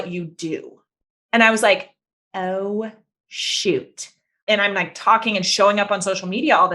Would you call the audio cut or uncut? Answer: cut